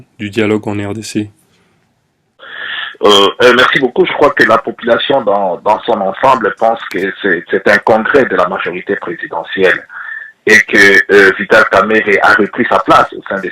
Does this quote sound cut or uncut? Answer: uncut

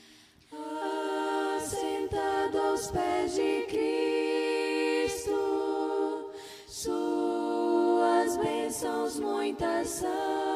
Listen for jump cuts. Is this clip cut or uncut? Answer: uncut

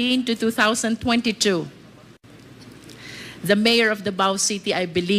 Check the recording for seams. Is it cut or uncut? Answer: uncut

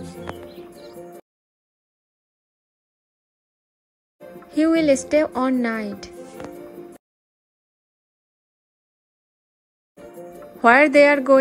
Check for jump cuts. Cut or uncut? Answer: uncut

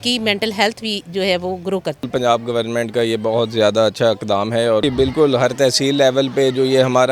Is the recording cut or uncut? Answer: cut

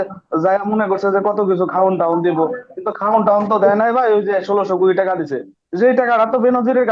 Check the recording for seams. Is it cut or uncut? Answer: uncut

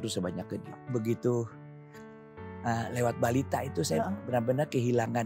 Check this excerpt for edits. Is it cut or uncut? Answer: cut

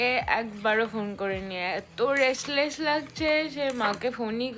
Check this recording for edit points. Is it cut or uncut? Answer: uncut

